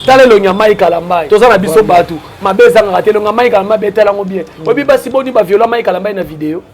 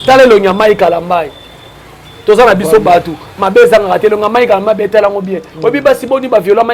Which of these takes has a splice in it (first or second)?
first